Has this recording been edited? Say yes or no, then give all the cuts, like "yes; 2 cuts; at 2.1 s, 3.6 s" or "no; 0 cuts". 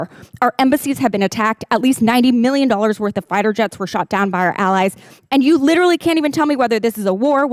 no; 0 cuts